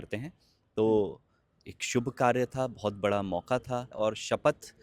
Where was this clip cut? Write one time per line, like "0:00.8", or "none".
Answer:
0:03.9

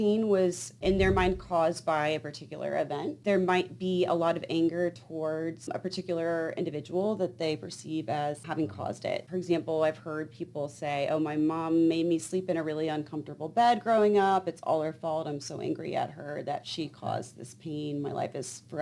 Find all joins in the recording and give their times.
none

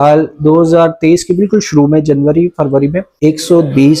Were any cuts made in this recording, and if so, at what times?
0:03.1

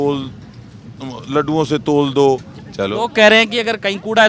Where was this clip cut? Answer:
0:02.6

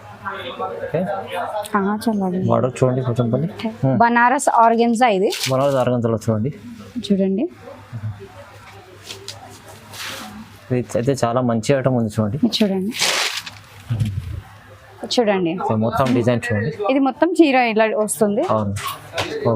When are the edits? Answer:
0:03.7
0:14.9

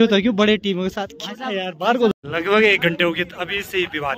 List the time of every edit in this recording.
0:02.1

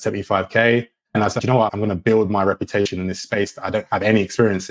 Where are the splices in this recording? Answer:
0:01.3

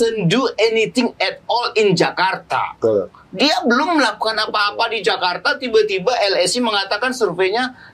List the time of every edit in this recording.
none

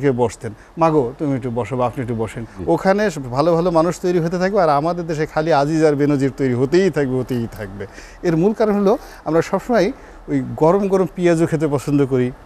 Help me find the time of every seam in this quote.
0:02.5

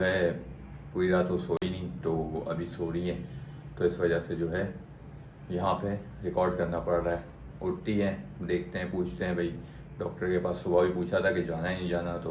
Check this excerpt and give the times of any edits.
none

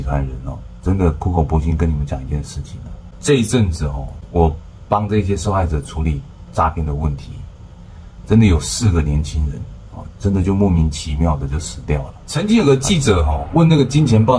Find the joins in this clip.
0:12.5

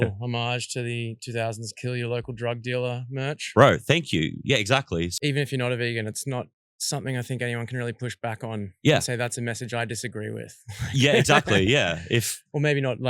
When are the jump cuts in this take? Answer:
0:05.1

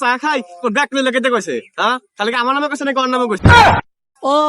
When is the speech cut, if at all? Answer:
0:03.4

